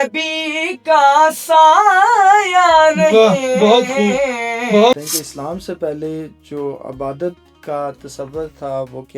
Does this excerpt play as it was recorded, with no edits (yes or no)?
no